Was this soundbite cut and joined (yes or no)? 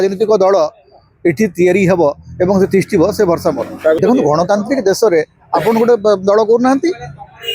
yes